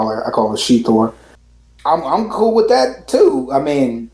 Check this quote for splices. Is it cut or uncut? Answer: cut